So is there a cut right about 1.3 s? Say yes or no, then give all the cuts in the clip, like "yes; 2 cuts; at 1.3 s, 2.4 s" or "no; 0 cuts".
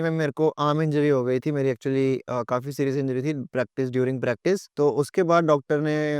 no; 1 cut; at 4.7 s